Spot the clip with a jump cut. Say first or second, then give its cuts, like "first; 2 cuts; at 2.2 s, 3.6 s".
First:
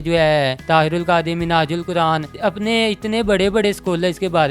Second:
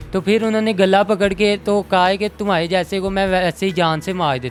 first; 1 cut; at 2.3 s